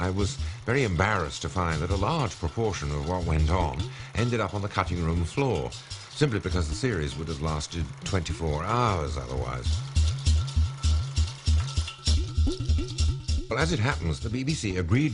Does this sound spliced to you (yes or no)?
yes